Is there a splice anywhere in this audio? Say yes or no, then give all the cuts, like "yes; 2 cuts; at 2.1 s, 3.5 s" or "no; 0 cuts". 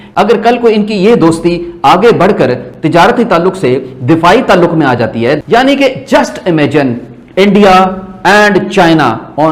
yes; 1 cut; at 5.4 s